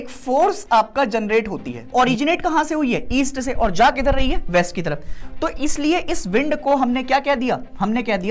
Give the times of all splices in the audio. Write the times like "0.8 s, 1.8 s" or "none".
1.9 s